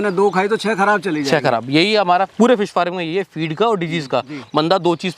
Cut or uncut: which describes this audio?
cut